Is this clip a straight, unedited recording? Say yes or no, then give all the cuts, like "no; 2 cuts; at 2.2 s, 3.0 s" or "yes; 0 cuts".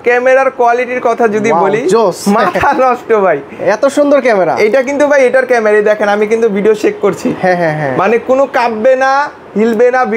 yes; 0 cuts